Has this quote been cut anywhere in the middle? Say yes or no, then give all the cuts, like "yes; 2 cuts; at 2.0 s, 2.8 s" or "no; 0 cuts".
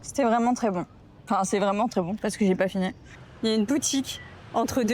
yes; 1 cut; at 3.3 s